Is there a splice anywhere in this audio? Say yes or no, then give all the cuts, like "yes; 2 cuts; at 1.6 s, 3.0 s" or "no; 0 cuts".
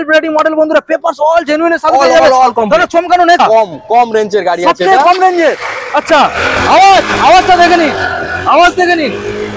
yes; 1 cut; at 3.4 s